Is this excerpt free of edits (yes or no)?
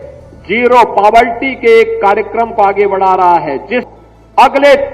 no